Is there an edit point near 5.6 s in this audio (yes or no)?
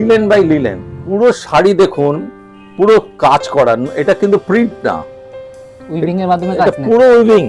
no